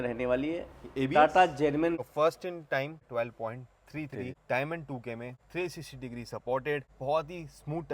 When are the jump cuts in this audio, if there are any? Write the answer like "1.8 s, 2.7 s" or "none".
2.0 s, 3.1 s, 4.4 s, 5.4 s, 6.9 s